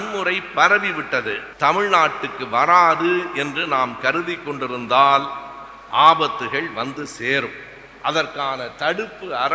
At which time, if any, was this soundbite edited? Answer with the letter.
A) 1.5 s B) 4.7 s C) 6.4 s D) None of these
A